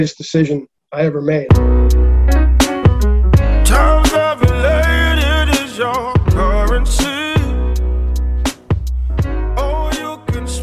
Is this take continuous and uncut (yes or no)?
no